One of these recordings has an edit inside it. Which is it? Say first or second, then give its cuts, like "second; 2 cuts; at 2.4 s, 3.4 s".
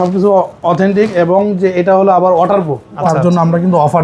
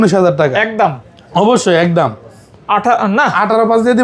first; 1 cut; at 3.0 s